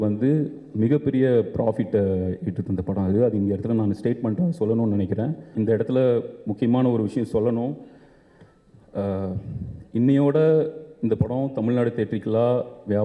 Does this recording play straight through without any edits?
no; 1 cut; at 5.5 s

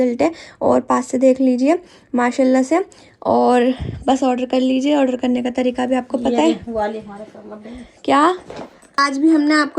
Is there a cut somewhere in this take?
no; 0 cuts

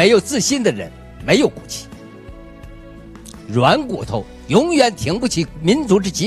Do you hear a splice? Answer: yes; 2 cuts; at 1.6 s, 3.5 s

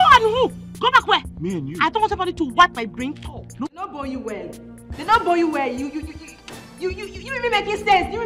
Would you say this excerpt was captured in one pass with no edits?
no; 1 cut; at 3.7 s

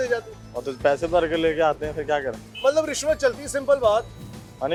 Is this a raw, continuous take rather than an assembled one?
yes; 0 cuts

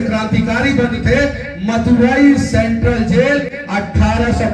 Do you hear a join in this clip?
no; 0 cuts

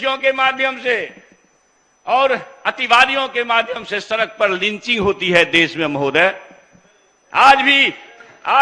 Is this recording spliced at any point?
no; 0 cuts

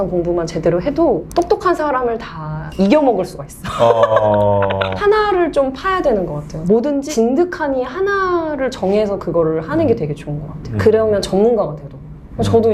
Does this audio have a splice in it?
no; 0 cuts

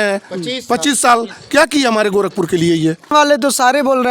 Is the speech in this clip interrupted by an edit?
yes; 1 cut; at 3.1 s

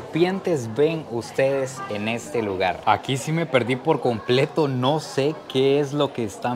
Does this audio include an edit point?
yes; 1 cut; at 2.8 s

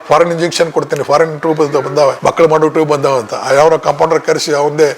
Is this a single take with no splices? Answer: no; 1 cut; at 2.2 s

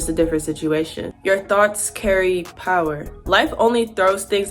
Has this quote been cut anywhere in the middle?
yes; 2 cuts; at 1.0 s, 3.0 s

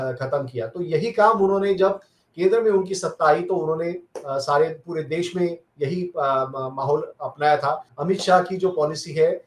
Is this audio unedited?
no; 1 cut; at 7.9 s

